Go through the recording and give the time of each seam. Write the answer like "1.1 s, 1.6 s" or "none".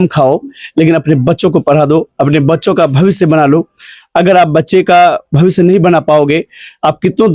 none